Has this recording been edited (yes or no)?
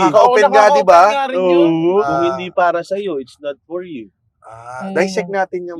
yes